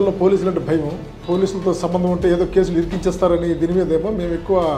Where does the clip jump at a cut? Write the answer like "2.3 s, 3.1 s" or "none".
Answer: 1.1 s